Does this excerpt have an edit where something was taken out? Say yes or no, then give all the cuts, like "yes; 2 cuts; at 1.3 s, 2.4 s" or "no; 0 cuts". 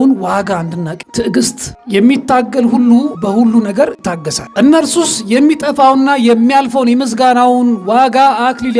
yes; 1 cut; at 1.0 s